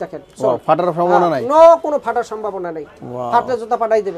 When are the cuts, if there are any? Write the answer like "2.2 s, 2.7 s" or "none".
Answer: none